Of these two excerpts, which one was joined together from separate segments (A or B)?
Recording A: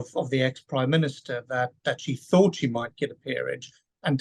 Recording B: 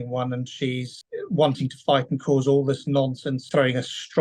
B